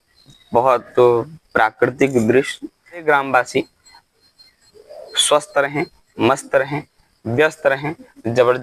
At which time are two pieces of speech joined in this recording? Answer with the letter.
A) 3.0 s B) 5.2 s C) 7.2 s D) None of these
A